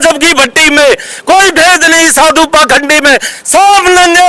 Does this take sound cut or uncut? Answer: uncut